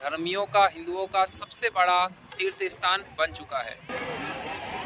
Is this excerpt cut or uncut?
cut